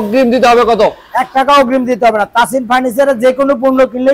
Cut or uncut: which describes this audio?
uncut